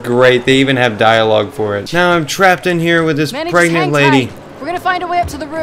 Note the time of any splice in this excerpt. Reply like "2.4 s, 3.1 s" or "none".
1.8 s